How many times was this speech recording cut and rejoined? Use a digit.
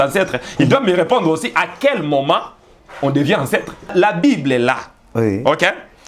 1